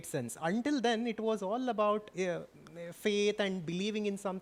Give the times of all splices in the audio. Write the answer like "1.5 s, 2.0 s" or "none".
none